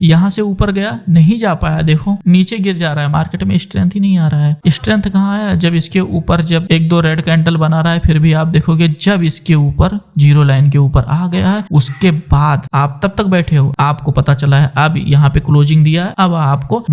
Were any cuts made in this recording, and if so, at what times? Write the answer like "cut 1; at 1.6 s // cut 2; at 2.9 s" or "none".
none